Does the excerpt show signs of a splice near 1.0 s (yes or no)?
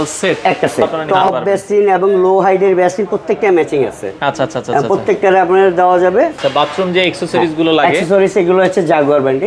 yes